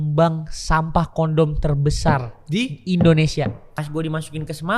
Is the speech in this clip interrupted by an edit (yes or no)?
yes